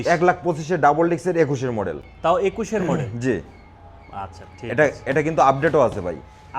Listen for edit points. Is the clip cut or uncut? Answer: uncut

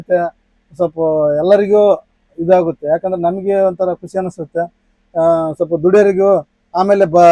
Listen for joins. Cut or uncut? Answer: uncut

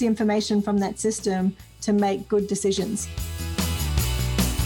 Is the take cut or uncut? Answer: cut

